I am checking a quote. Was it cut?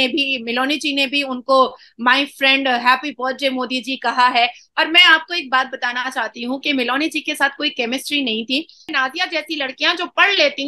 yes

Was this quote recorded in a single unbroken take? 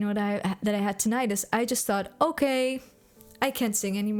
yes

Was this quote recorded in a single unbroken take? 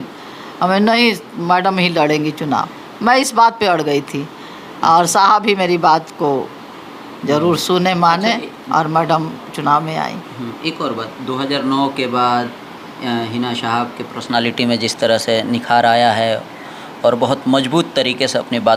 yes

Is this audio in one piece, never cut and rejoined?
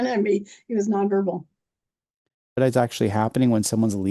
no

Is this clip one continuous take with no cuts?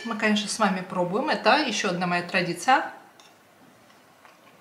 yes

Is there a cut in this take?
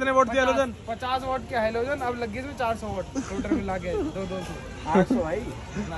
no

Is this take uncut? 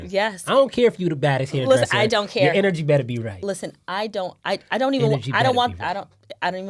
yes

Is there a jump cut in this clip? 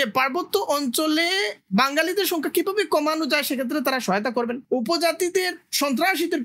yes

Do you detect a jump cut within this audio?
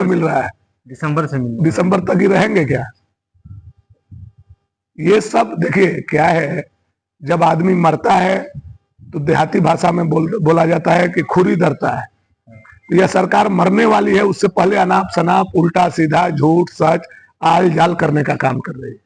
no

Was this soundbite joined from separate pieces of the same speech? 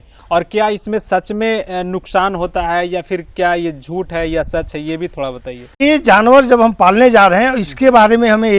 no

